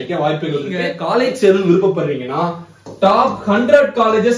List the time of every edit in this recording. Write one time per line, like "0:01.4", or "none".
0:00.9